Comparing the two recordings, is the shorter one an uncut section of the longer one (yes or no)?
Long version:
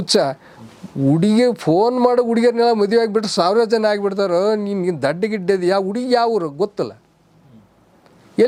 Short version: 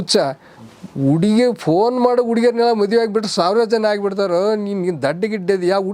yes